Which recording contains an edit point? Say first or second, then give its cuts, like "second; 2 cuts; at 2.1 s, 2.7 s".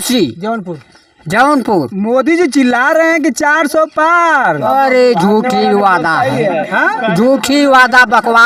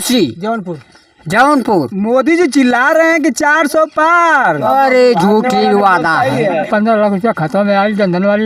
second; 1 cut; at 6.7 s